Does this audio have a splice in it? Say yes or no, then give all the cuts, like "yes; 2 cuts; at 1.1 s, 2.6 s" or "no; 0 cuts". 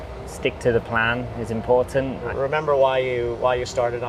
yes; 1 cut; at 2.3 s